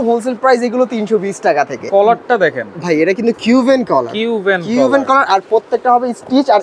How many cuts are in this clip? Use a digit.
1